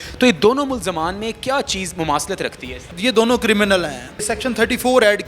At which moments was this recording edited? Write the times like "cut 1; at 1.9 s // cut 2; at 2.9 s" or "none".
cut 1; at 2.9 s // cut 2; at 4.3 s